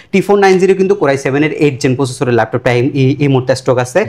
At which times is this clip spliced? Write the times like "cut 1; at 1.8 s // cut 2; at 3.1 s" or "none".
none